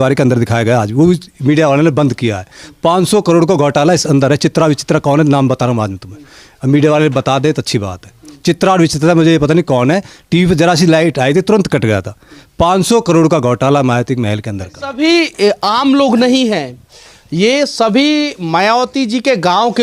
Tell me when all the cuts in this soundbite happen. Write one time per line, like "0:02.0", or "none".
0:14.8